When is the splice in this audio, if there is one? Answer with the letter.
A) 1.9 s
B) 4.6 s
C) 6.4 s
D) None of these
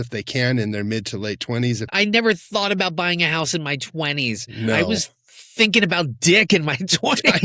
A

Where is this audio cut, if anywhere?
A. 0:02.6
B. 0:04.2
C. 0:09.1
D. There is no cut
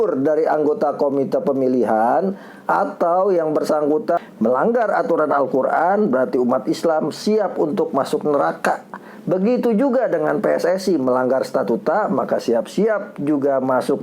B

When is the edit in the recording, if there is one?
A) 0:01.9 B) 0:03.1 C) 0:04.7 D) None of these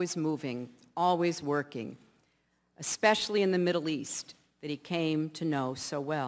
A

